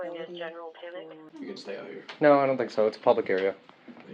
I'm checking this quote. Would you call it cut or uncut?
cut